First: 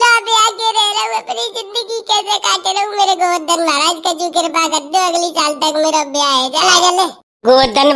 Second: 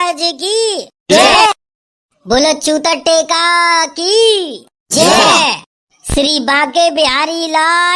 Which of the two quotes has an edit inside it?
first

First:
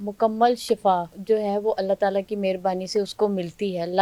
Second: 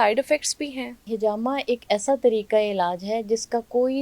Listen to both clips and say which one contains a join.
second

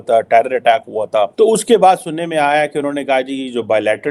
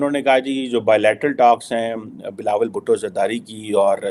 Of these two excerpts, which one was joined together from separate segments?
first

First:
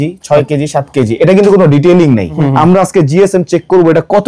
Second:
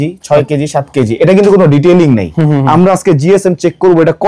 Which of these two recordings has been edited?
first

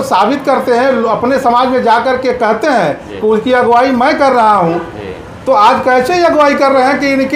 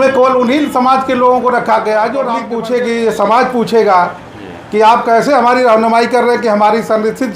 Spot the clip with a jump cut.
second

